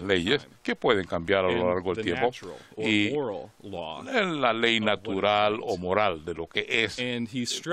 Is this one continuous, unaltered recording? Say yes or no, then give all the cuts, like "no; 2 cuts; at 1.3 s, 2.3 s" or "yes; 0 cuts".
yes; 0 cuts